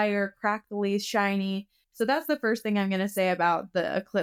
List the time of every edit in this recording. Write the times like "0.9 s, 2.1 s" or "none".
none